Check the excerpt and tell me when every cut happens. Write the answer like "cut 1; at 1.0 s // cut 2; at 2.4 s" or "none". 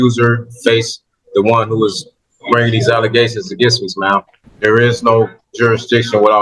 cut 1; at 4.4 s